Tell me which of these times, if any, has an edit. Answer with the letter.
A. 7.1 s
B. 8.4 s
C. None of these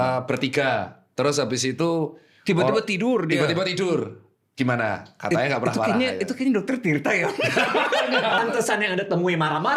B